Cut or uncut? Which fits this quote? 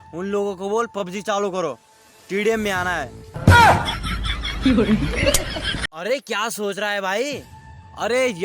cut